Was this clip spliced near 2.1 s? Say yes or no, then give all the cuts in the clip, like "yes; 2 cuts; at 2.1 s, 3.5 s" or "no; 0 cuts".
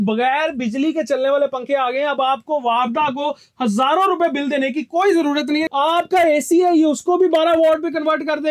no; 1 cut; at 5.7 s